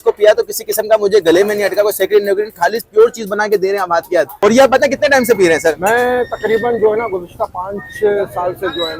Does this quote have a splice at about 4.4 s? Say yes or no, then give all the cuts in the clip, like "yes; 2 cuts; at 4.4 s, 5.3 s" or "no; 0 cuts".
yes; 1 cut; at 4.4 s